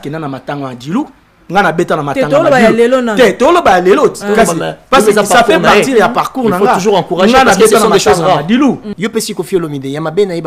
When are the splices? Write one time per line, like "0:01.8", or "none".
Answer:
0:08.9